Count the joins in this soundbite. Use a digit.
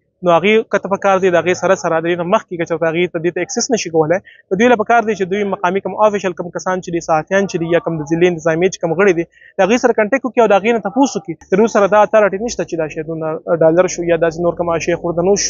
1